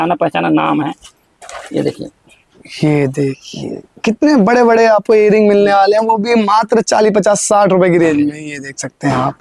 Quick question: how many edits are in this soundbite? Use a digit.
0